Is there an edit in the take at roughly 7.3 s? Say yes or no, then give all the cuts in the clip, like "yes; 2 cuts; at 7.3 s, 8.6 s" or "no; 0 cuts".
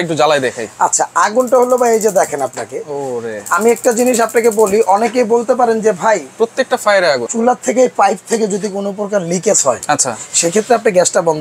yes; 1 cut; at 7.3 s